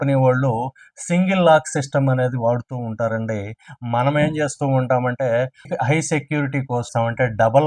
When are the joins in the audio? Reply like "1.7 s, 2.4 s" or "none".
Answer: none